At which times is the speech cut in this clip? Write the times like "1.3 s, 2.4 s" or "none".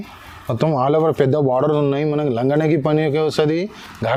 none